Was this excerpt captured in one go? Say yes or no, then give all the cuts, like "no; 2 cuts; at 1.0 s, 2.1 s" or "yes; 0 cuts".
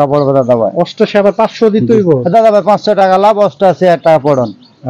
yes; 0 cuts